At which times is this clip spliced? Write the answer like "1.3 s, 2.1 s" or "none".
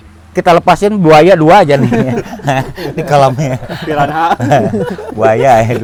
none

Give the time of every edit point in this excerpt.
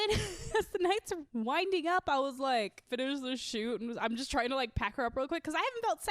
1.2 s, 2.9 s

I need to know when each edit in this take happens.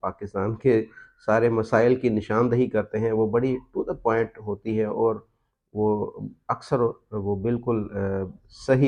none

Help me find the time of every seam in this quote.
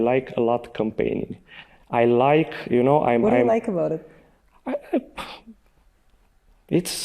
none

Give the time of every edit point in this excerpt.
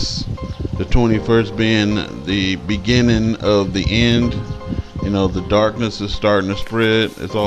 6.0 s

